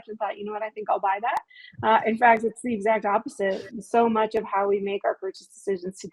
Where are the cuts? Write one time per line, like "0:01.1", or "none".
none